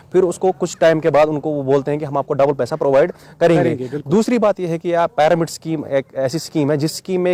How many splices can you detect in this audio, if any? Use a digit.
0